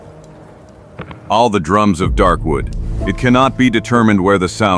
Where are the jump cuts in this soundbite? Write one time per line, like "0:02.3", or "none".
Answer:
none